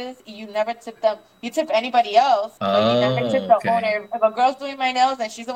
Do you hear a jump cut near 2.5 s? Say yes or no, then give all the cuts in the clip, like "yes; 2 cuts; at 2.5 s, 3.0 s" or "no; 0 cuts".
yes; 1 cut; at 2.5 s